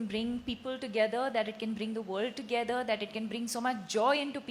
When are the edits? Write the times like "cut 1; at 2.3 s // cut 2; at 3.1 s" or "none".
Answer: none

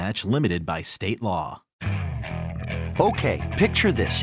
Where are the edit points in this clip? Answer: cut 1; at 1.7 s

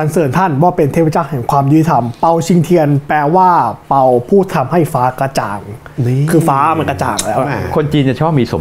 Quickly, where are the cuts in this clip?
none

